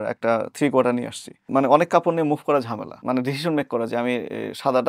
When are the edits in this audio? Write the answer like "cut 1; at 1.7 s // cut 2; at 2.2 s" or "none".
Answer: cut 1; at 1.4 s // cut 2; at 2.9 s